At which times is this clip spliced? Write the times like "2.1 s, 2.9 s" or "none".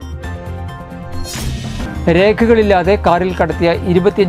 1.8 s